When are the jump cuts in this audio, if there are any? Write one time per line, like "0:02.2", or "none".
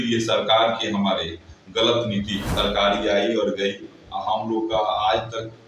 0:02.4